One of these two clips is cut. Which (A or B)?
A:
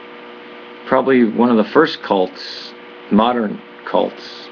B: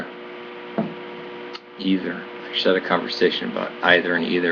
B